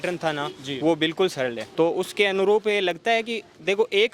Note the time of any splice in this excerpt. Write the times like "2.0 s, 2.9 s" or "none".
1.6 s